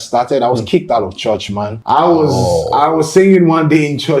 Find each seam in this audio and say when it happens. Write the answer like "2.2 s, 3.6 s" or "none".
1.8 s